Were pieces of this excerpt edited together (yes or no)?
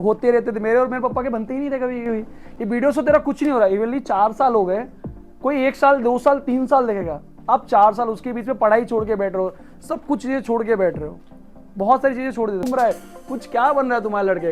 yes